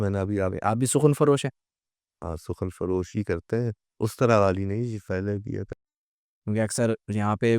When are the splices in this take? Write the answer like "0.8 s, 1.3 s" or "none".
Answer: 5.7 s